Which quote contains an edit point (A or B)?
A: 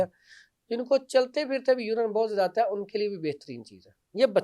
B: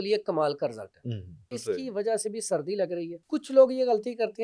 B